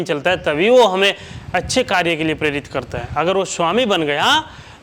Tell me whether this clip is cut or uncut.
uncut